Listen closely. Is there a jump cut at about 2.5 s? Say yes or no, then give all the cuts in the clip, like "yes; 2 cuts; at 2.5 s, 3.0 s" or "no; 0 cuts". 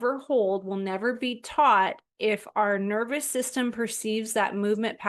no; 0 cuts